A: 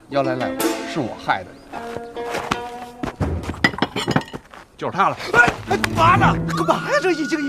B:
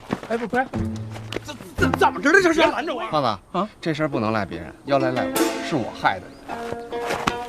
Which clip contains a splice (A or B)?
B